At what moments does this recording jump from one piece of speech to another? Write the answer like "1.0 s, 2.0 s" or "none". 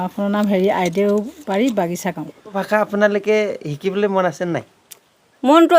2.6 s